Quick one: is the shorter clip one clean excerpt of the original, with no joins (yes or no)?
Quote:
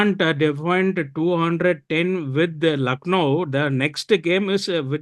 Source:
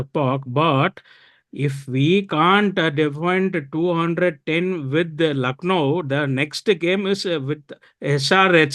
yes